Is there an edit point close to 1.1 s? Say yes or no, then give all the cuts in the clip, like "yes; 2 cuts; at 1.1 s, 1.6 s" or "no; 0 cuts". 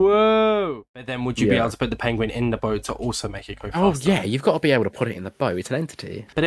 yes; 1 cut; at 1.1 s